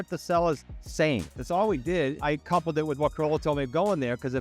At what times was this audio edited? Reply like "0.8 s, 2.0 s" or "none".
1.3 s, 2.2 s